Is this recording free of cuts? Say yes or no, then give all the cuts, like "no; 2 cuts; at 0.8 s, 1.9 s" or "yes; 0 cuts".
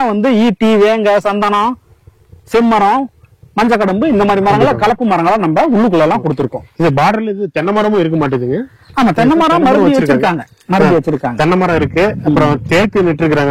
yes; 0 cuts